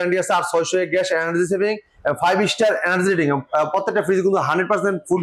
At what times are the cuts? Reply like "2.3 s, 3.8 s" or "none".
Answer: none